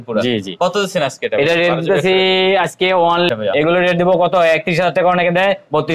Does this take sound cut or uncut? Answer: cut